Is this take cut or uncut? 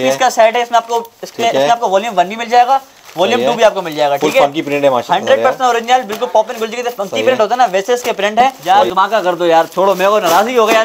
cut